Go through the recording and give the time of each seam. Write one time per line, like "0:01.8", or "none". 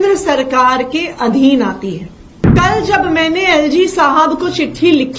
0:02.5